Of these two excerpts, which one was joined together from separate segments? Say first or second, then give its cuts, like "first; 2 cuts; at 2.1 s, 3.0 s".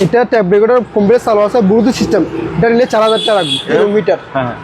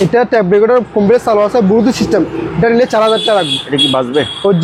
first; 1 cut; at 3.7 s